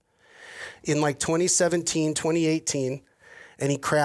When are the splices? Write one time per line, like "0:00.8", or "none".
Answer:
none